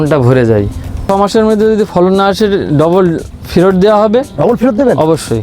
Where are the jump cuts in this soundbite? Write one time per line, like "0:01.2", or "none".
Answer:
0:01.0